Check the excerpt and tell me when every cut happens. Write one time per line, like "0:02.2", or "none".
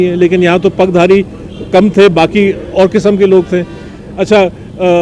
none